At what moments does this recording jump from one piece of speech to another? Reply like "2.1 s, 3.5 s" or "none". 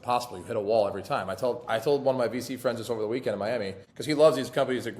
3.9 s

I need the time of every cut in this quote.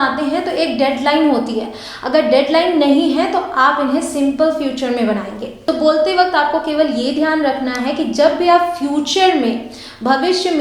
5.5 s

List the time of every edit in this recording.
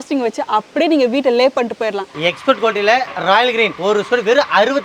2.1 s, 3.8 s

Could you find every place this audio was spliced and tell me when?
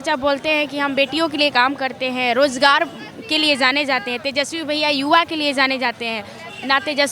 none

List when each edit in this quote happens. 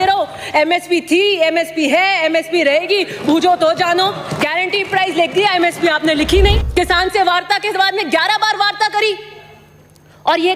6.6 s

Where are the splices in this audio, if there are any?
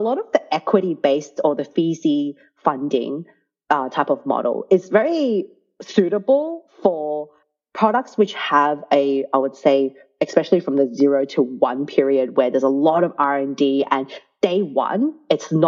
none

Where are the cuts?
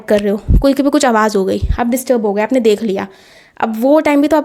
none

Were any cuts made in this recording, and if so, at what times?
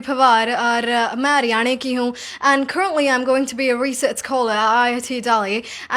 none

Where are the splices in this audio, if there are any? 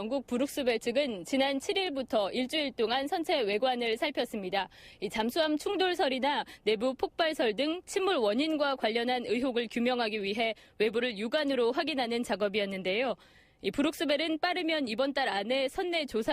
8.0 s

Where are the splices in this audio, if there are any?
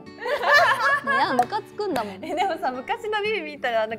2.1 s

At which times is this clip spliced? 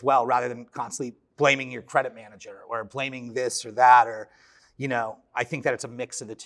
none

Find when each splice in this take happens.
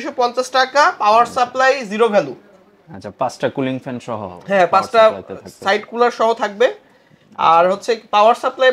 none

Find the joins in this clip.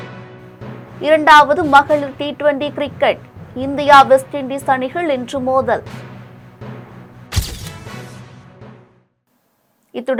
none

